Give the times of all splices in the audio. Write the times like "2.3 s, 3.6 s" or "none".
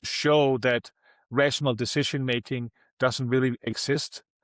none